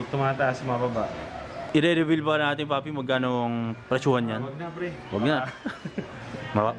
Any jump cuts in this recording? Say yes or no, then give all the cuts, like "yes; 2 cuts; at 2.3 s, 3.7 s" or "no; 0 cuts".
no; 0 cuts